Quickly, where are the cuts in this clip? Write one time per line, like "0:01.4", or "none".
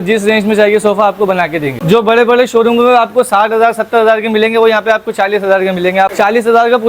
0:01.7
0:06.1